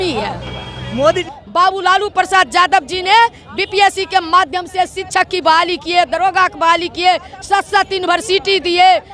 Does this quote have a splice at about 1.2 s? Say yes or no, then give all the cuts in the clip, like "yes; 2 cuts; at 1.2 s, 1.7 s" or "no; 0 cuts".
yes; 1 cut; at 1.2 s